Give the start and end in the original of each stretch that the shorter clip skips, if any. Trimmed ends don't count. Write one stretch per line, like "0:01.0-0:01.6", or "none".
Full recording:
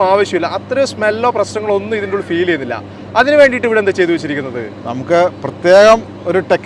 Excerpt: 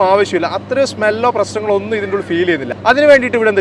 0:02.7-0:03.0